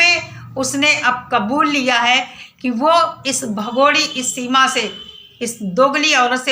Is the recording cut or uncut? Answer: uncut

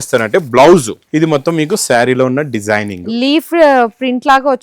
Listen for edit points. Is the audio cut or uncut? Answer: cut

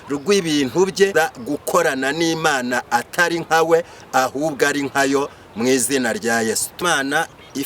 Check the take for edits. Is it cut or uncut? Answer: cut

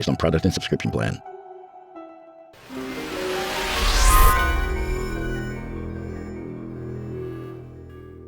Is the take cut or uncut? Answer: cut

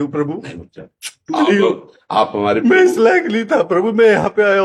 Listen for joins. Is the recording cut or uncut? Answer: uncut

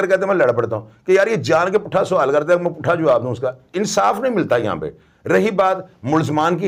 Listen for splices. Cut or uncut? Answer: uncut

